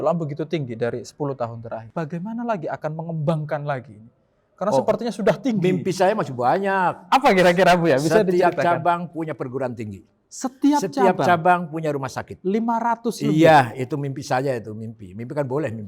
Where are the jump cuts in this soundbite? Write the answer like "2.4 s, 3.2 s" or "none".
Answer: 1.9 s